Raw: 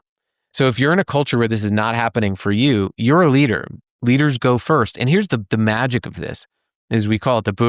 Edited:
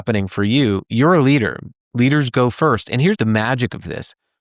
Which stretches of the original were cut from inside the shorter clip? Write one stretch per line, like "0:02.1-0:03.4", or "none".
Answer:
0:05.2-0:05.5